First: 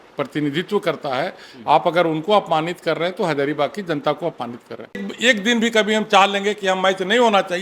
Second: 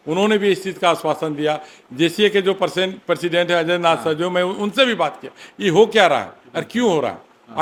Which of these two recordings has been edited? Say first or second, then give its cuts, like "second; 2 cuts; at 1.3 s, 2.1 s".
first; 1 cut; at 5.1 s